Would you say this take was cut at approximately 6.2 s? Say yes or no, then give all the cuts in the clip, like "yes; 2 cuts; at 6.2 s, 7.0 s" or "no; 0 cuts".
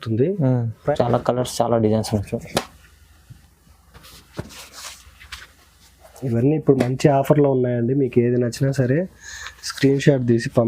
no; 1 cut; at 0.9 s